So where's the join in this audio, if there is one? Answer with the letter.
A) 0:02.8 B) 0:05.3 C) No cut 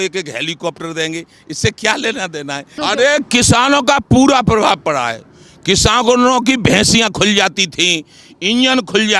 A